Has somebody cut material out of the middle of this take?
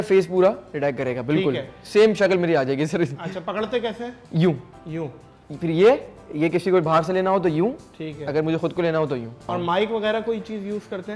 yes; 1 cut; at 9.5 s

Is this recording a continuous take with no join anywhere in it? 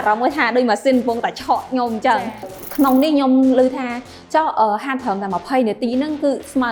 no; 1 cut; at 2.5 s

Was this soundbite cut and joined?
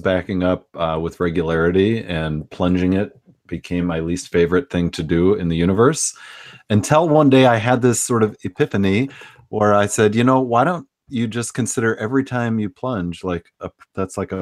no; 0 cuts

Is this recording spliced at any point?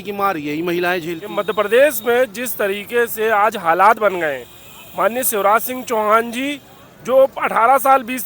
yes; 1 cut; at 1.2 s

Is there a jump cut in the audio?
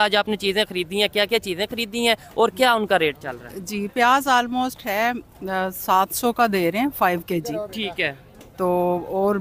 no; 0 cuts

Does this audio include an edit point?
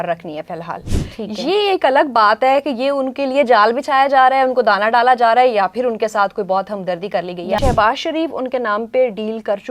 yes; 1 cut; at 7.6 s

